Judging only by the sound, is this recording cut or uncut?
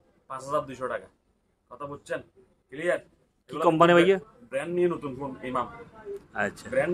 uncut